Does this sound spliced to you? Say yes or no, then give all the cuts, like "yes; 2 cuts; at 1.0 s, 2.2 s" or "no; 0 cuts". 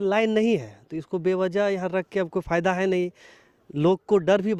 no; 0 cuts